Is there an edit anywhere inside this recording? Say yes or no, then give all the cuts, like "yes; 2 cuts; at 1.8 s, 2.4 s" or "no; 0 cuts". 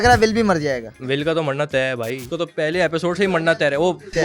yes; 2 cuts; at 1.0 s, 2.2 s